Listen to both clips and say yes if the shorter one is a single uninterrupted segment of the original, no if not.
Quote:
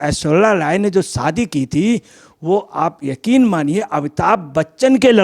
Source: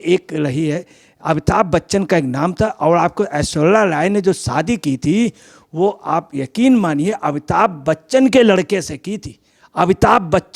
yes